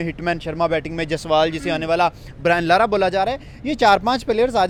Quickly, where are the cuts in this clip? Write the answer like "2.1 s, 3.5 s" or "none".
none